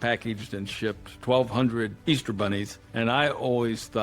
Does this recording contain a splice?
yes; 2 cuts; at 2.0 s, 2.8 s

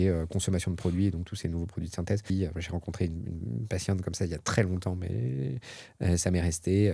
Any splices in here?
yes; 1 cut; at 2.3 s

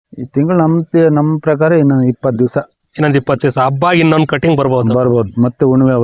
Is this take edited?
no; 0 cuts

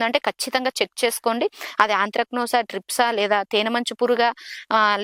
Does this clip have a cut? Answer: no; 0 cuts

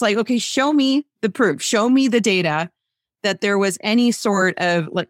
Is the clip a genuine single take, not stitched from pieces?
yes; 0 cuts

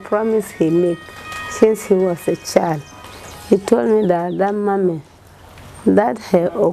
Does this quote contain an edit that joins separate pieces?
no; 0 cuts

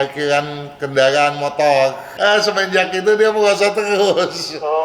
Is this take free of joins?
no; 1 cut; at 2.0 s

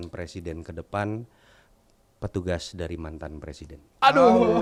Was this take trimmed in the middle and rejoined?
no; 0 cuts

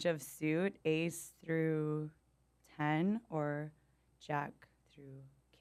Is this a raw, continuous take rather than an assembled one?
yes; 0 cuts

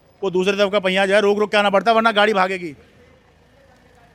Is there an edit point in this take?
no; 0 cuts

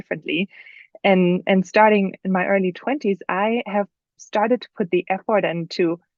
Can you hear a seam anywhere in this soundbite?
no; 0 cuts

